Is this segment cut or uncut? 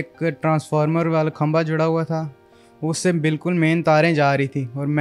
uncut